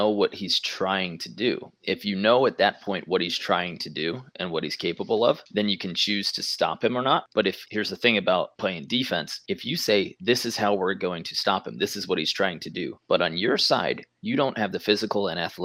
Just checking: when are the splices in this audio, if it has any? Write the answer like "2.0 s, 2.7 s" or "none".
7.6 s